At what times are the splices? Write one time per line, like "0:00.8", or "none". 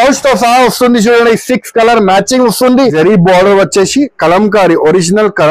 0:02.9